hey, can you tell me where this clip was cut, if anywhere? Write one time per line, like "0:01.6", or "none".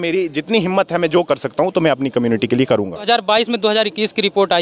0:03.1